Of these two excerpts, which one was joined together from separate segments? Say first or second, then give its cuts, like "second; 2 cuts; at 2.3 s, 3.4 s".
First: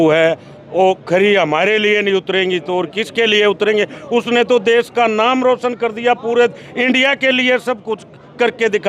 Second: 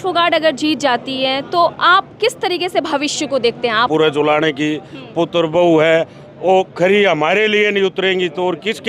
second; 1 cut; at 3.9 s